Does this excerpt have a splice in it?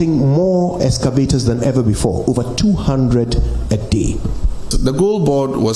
yes; 1 cut; at 4.7 s

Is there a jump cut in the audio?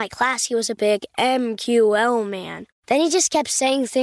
no; 0 cuts

